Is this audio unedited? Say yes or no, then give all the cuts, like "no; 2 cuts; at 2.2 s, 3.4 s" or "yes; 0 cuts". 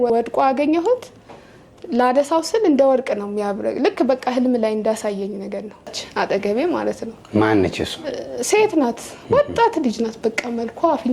no; 1 cut; at 6.0 s